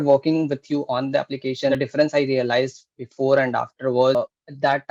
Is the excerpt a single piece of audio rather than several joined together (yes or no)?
no